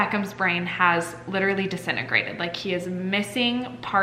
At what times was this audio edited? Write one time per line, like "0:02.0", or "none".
none

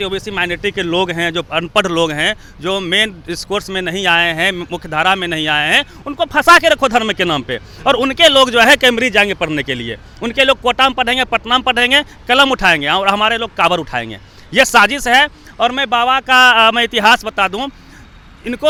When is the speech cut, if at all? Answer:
none

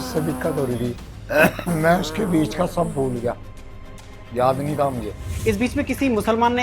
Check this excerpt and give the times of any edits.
0:01.1
0:05.3

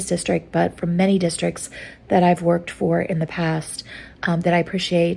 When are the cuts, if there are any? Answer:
none

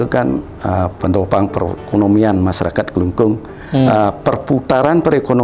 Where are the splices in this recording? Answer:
none

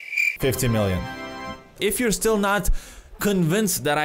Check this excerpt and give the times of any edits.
0:01.8

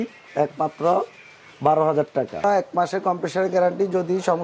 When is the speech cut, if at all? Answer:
0:02.4

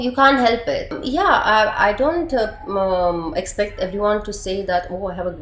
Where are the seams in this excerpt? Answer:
0:01.0

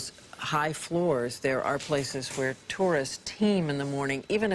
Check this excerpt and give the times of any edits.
0:03.4

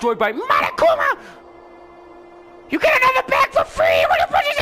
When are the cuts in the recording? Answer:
none

